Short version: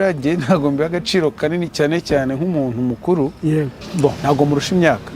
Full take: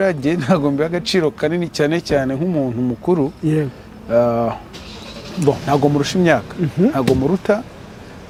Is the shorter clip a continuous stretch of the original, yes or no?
no